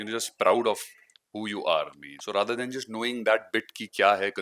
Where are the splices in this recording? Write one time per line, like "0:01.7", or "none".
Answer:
0:02.0